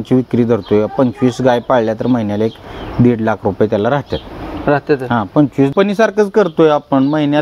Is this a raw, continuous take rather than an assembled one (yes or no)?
no